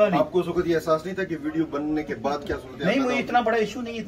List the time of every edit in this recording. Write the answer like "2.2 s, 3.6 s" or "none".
none